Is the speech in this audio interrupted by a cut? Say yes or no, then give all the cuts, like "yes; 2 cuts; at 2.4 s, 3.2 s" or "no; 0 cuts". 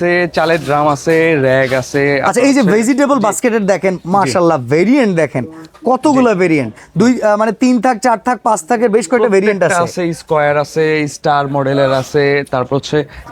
no; 0 cuts